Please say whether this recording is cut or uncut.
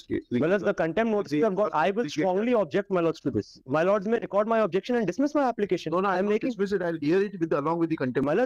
uncut